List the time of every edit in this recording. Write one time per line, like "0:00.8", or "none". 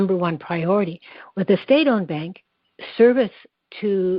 none